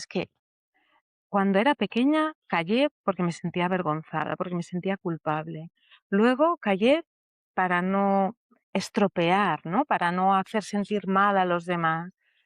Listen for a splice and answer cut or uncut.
uncut